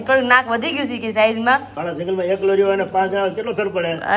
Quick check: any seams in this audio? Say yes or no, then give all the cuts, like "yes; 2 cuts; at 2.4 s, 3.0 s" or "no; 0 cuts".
yes; 1 cut; at 1.8 s